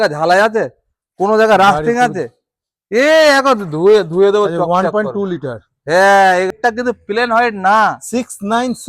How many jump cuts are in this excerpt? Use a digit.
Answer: 1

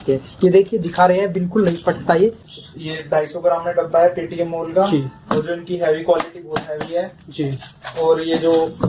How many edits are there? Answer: 1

